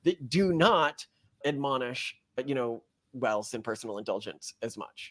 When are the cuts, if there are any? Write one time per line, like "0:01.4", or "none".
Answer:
none